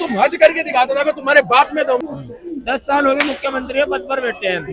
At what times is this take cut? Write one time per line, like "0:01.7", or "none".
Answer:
0:02.0